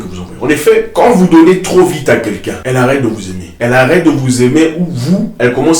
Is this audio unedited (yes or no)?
no